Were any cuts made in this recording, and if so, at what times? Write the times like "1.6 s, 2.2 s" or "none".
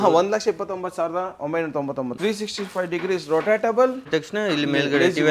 2.2 s, 4.1 s